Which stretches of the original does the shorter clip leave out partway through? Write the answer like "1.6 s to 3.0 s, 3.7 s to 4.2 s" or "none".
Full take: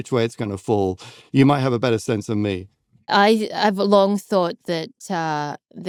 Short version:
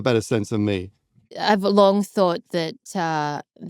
3.1 s to 3.4 s

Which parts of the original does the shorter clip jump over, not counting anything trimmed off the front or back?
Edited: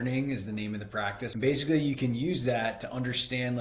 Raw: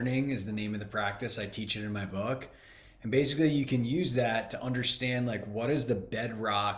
1.3 s to 3.0 s

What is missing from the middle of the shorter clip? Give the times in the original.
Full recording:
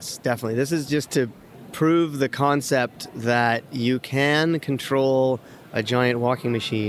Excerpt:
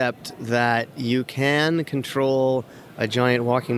none

